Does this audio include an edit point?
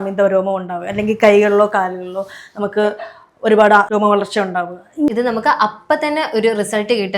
yes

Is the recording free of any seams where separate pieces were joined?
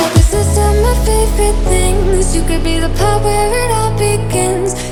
yes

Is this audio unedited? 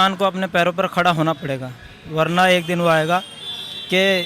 yes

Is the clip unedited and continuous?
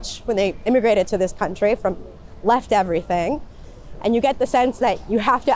yes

